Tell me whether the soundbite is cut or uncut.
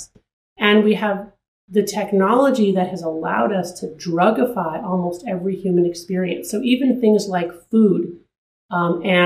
uncut